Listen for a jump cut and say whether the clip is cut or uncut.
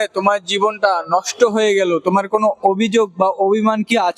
uncut